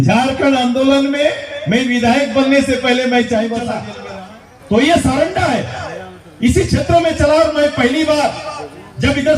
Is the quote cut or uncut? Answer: cut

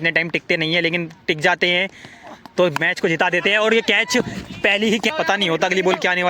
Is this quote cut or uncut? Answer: cut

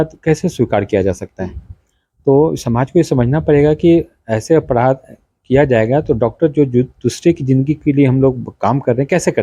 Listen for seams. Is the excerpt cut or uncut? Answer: uncut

